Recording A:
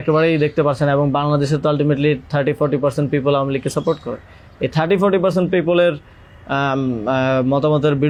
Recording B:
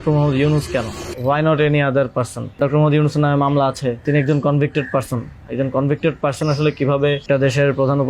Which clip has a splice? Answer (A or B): B